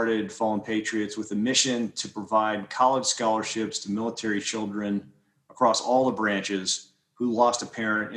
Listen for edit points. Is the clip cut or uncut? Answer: uncut